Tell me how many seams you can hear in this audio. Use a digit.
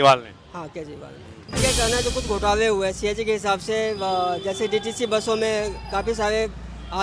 1